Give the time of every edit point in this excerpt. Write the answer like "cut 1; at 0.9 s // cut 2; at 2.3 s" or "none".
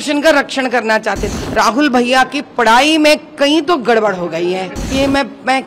cut 1; at 1.2 s // cut 2; at 4.8 s